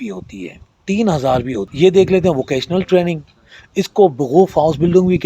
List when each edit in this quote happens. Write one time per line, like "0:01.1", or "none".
0:01.6